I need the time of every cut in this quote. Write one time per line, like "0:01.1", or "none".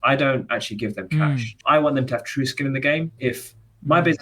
0:01.6
0:03.2